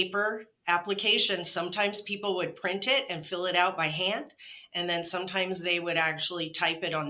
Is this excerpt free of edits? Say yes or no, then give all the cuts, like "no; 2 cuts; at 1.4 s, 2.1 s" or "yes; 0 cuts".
yes; 0 cuts